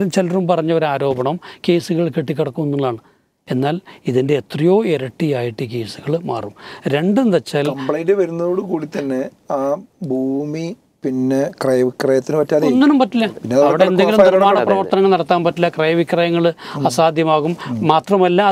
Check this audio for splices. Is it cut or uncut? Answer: uncut